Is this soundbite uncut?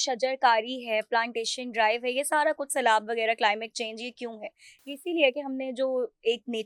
yes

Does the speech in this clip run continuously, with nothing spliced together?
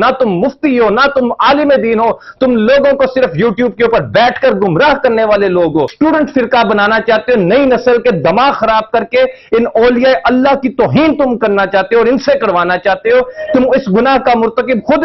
no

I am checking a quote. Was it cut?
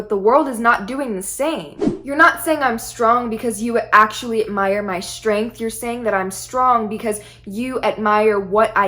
yes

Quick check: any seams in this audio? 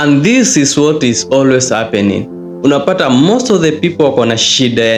no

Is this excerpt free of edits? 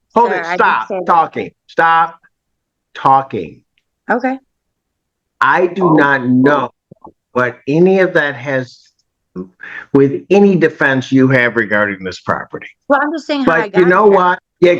yes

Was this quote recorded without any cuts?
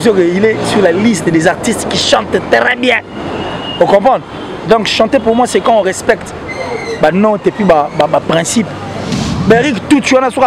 no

